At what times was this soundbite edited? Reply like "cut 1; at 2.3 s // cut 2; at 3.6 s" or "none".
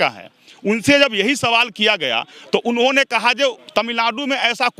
cut 1; at 3.6 s